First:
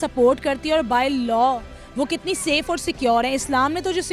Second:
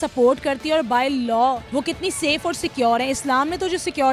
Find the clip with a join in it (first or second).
second